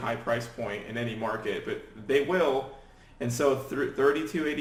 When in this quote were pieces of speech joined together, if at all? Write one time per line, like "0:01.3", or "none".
none